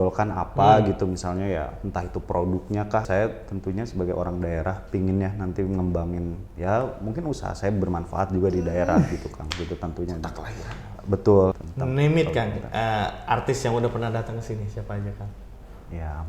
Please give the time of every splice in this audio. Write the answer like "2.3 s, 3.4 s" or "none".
3.1 s, 11.6 s